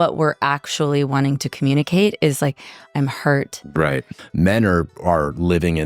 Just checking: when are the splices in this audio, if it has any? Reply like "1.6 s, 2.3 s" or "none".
4.2 s